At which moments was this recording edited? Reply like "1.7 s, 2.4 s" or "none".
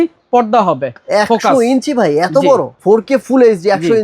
2.7 s